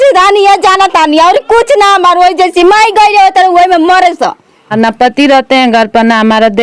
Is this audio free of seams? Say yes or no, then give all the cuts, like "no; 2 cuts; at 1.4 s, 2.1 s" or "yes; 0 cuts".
no; 1 cut; at 4.7 s